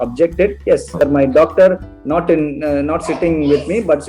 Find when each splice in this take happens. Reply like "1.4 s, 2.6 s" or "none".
1.0 s